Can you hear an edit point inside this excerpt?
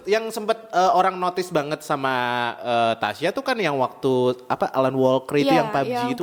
no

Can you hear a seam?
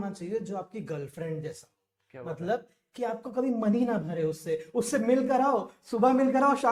no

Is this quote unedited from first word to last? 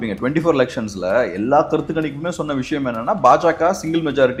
yes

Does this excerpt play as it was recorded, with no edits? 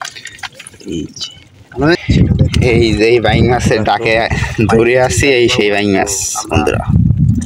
no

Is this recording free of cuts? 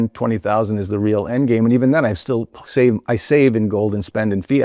yes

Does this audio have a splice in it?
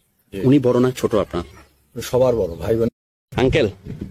yes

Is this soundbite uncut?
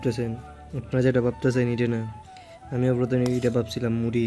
yes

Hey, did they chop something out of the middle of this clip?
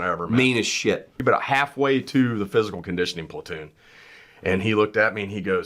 yes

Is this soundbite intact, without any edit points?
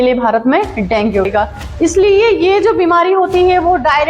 no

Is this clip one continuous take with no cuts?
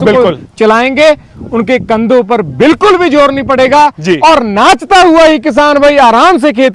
yes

